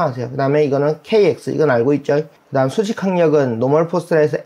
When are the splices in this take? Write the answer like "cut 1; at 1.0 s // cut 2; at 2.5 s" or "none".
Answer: cut 1; at 2.4 s